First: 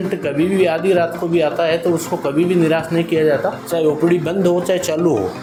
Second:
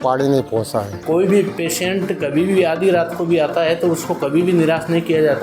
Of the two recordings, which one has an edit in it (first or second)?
second